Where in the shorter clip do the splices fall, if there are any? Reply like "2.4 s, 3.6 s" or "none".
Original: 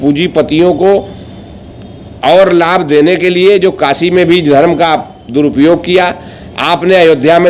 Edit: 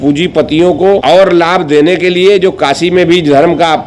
1.0 s